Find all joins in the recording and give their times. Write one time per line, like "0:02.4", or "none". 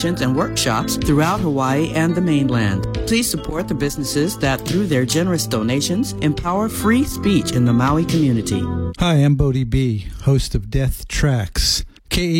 0:08.8